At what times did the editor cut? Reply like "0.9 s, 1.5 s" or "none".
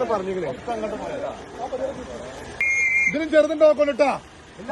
2.6 s